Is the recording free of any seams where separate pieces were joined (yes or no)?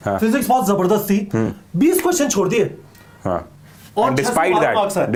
yes